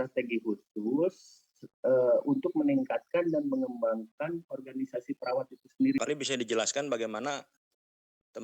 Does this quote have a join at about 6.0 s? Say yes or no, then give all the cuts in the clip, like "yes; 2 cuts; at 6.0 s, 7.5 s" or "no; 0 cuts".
yes; 1 cut; at 6.0 s